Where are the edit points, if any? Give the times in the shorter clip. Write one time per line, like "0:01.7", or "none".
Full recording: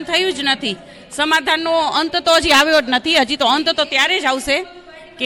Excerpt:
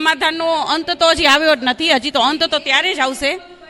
none